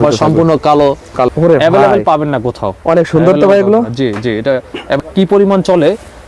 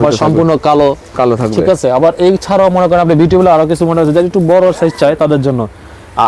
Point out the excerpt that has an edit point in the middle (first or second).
first